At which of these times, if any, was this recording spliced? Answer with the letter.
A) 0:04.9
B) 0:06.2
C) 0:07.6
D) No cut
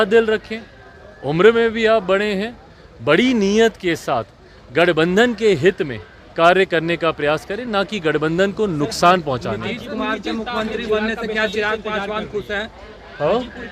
D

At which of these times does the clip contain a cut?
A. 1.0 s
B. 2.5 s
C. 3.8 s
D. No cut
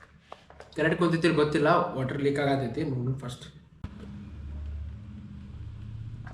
C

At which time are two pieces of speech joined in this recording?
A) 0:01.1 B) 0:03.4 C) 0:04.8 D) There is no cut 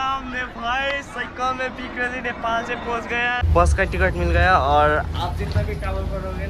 B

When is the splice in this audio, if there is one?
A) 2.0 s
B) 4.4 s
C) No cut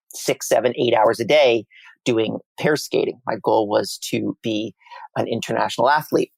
C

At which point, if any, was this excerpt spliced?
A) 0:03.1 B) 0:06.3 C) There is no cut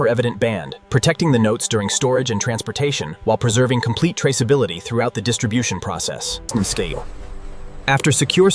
B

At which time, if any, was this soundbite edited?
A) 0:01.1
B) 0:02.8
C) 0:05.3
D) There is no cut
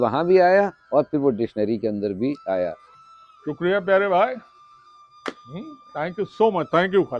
B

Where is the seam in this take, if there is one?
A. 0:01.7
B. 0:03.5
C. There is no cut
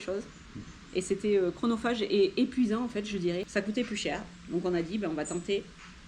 B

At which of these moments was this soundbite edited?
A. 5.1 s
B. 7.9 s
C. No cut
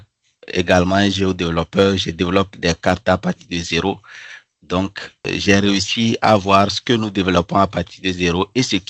C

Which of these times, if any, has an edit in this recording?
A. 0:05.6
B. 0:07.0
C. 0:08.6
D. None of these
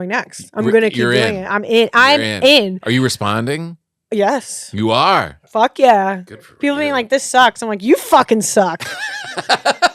D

